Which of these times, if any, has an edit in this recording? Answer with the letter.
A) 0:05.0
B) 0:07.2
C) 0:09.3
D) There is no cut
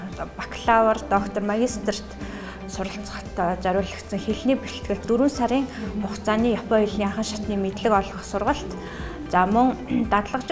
A